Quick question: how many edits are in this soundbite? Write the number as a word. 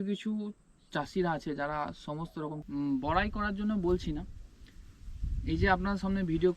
one